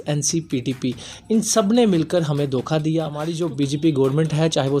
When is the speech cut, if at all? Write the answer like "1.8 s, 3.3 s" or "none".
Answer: 3.2 s